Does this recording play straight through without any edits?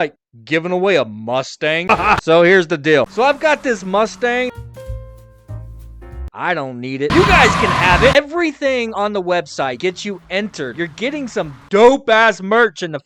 no; 1 cut; at 3.1 s

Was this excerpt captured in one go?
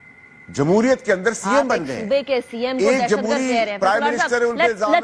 yes; 0 cuts

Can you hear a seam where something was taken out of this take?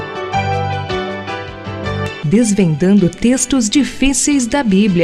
no; 0 cuts

